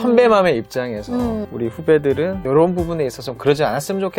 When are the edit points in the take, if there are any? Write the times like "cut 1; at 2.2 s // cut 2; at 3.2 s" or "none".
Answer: none